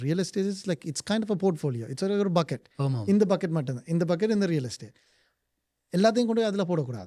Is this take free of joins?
yes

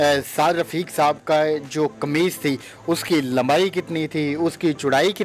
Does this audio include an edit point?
no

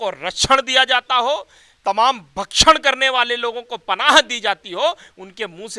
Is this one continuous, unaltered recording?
yes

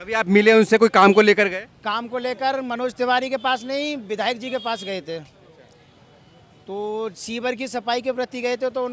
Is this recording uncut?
yes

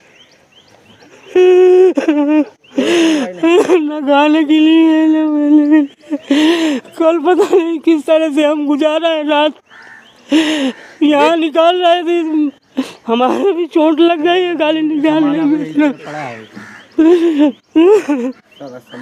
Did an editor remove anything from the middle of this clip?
no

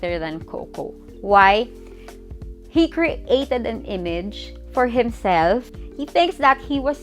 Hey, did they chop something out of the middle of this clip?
yes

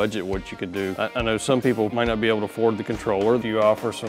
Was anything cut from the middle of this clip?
yes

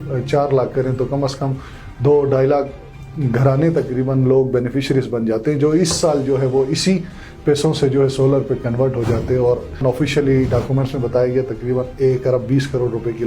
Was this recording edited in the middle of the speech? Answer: yes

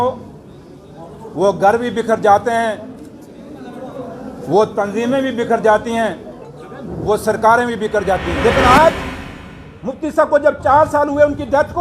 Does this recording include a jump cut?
yes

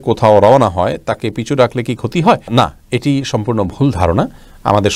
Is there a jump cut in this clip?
no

